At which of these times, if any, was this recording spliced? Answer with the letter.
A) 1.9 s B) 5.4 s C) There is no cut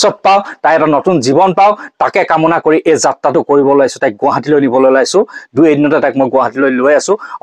C